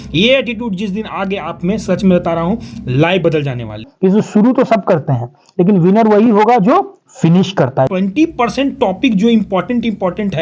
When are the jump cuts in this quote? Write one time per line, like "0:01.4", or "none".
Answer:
0:03.9
0:07.9

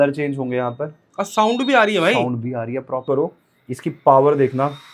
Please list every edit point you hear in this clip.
0:03.0

